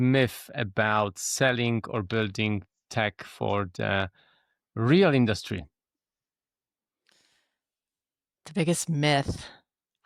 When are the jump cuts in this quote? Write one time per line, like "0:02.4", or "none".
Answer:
none